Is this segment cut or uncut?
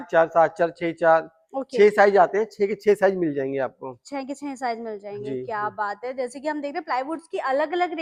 uncut